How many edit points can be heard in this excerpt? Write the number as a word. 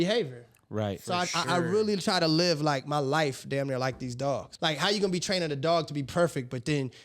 one